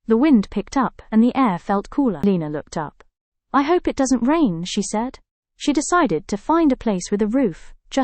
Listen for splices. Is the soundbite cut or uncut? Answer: cut